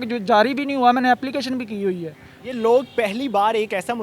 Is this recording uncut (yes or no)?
yes